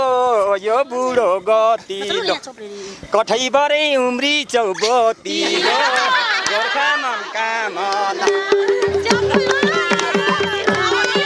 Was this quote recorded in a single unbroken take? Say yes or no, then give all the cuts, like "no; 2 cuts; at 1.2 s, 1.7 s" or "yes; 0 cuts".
yes; 0 cuts